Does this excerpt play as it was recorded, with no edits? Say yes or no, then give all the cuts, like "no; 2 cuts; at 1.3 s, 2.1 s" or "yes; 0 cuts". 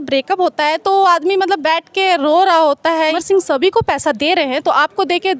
no; 1 cut; at 3.2 s